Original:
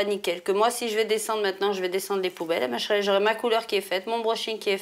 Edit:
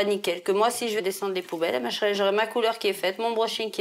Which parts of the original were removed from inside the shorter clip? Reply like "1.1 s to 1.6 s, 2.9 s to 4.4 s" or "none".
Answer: 1.0 s to 1.9 s

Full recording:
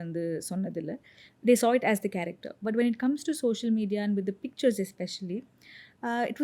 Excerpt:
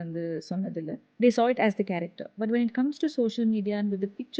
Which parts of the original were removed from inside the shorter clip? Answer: 1.0 s to 1.3 s

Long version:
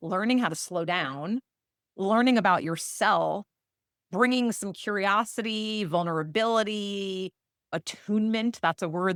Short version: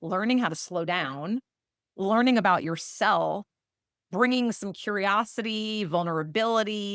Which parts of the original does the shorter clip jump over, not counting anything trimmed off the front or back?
none

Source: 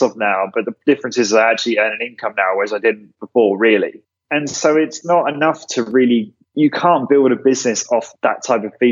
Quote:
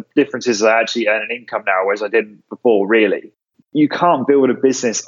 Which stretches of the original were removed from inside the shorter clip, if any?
4.3 s to 6.4 s

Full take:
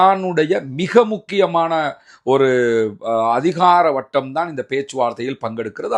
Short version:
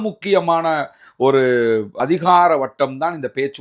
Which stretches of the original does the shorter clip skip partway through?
3.1 s to 3.3 s

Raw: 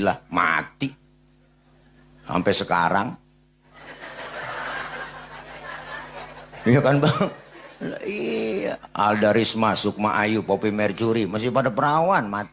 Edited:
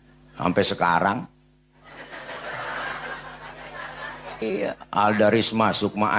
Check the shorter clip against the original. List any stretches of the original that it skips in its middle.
6.3 s to 8.4 s

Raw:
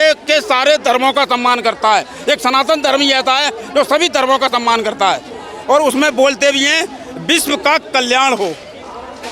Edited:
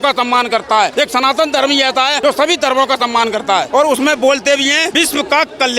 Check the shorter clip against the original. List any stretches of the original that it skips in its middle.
2.0 s to 2.2 s, 3.5 s to 3.7 s, 5.2 s to 5.6 s, 6.8 s to 7.2 s

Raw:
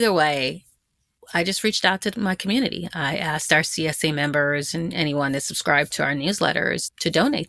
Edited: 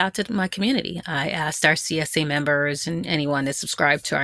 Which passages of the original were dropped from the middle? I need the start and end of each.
none

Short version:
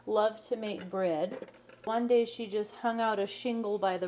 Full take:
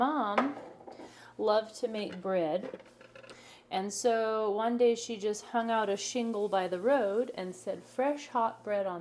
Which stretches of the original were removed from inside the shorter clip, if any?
3.2 s to 4.6 s

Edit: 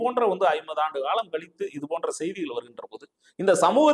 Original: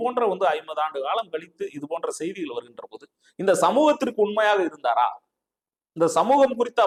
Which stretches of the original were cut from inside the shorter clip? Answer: none

